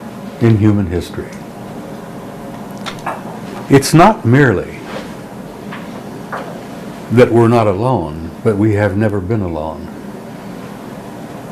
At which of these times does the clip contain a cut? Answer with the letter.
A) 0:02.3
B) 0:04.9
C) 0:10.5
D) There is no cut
D